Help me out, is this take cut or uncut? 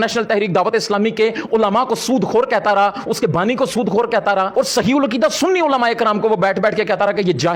uncut